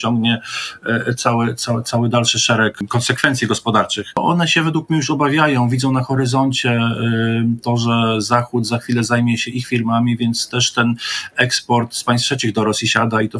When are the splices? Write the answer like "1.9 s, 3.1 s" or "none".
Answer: 2.8 s, 4.2 s